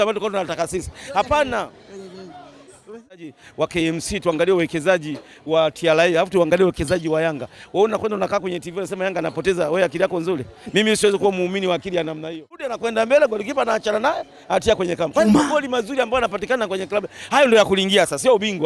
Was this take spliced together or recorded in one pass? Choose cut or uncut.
cut